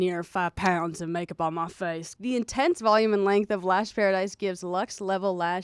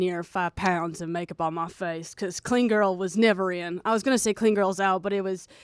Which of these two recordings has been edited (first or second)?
first